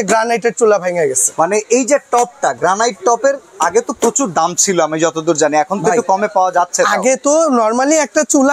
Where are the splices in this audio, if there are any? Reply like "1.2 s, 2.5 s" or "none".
none